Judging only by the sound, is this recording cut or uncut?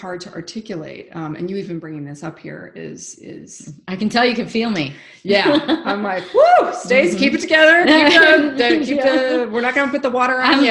uncut